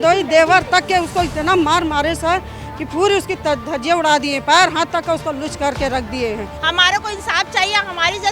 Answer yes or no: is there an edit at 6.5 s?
yes